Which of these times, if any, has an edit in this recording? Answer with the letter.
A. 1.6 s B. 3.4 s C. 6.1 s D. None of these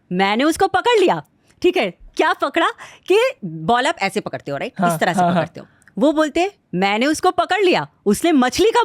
B